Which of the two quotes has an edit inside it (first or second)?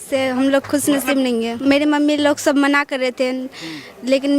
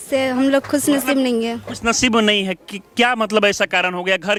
first